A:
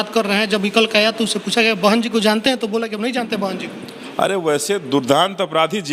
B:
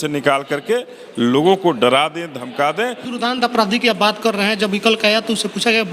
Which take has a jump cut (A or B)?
B